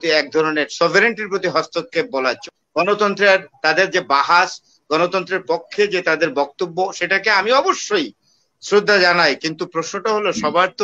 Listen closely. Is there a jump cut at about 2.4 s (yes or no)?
yes